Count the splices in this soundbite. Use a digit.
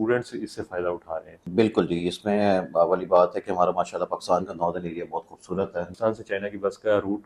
2